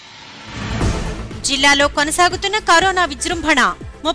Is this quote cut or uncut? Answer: uncut